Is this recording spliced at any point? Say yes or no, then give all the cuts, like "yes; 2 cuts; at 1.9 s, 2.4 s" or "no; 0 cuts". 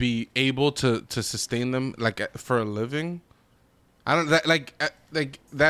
no; 0 cuts